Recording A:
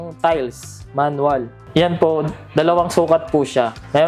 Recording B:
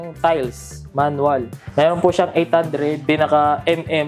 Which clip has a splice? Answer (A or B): B